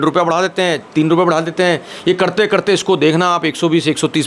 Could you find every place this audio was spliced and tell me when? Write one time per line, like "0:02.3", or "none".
none

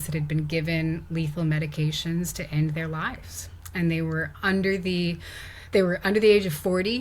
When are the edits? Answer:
none

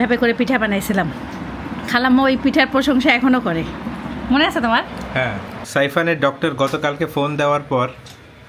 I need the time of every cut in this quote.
none

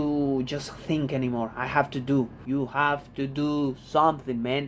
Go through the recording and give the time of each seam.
0:02.4

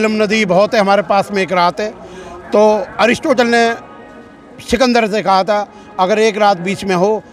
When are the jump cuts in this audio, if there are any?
none

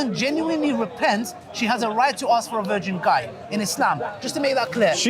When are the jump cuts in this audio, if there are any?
none

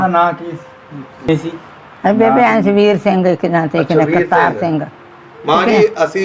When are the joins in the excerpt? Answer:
0:01.3

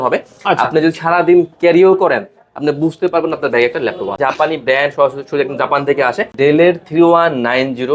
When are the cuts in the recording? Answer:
0:04.2
0:06.3

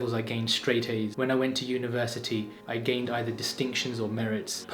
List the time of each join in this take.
0:02.6

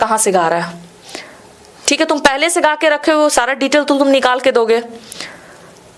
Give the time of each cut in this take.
0:02.3

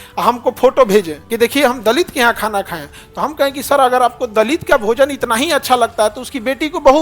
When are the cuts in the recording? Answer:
0:01.2

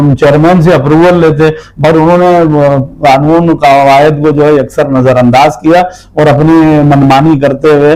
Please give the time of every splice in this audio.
none

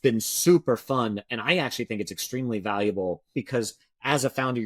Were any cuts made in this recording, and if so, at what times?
0:03.3

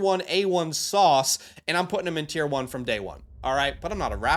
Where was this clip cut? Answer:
none

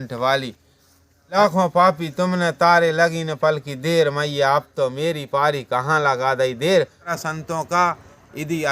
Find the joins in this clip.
0:01.4
0:07.1

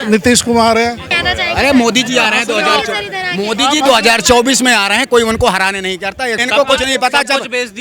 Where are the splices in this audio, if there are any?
0:01.1
0:06.4

